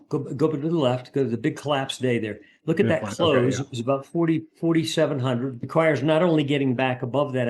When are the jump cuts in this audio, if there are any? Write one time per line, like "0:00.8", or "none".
0:04.5
0:05.7